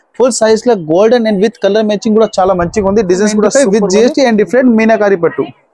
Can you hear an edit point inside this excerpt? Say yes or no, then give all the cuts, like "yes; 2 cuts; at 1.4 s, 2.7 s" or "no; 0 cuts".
yes; 1 cut; at 3.5 s